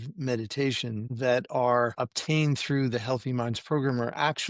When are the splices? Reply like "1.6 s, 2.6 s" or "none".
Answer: 1.1 s, 1.9 s